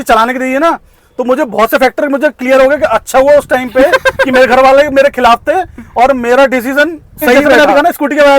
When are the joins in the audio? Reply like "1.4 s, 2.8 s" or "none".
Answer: 7.5 s